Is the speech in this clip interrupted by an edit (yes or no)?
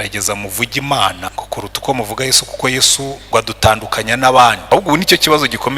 yes